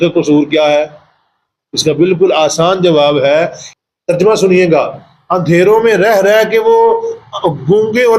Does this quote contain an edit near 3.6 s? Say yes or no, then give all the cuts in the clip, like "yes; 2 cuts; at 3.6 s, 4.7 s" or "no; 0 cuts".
yes; 1 cut; at 3.6 s